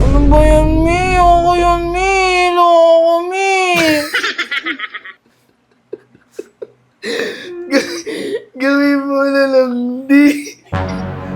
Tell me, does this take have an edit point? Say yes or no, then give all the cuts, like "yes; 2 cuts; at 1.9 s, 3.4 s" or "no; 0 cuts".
no; 0 cuts